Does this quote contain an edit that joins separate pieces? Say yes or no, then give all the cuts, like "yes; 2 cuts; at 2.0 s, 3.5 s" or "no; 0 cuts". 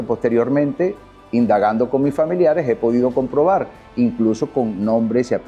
no; 0 cuts